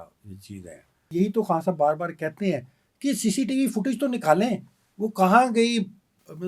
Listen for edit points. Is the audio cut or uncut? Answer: cut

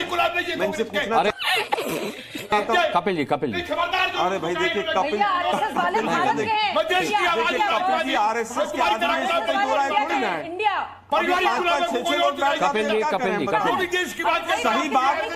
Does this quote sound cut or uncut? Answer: uncut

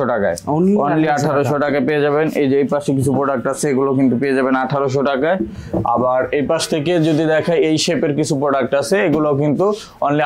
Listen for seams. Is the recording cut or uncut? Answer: uncut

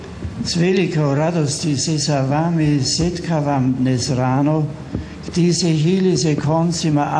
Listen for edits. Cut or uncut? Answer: uncut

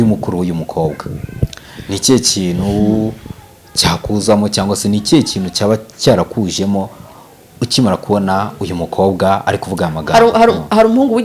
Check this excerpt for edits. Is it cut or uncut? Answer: uncut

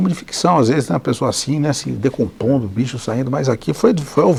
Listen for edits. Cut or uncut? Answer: uncut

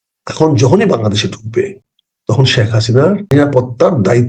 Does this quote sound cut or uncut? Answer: cut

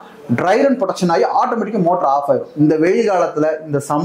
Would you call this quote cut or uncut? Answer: uncut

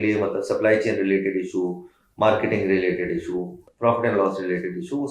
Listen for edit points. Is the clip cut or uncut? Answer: cut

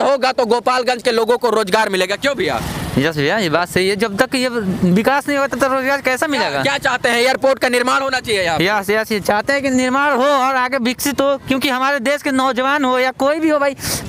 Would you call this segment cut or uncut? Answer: uncut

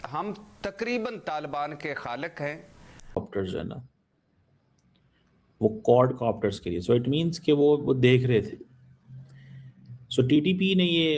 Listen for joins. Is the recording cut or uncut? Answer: cut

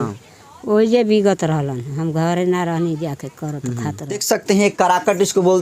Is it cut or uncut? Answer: cut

